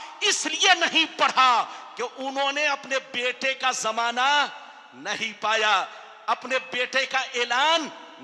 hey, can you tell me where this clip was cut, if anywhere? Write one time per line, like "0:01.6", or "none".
none